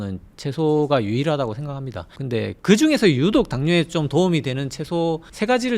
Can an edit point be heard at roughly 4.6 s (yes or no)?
no